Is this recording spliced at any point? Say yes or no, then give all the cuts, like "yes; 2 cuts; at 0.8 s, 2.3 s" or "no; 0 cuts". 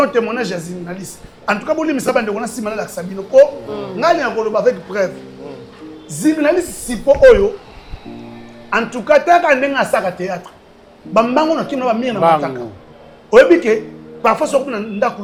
no; 0 cuts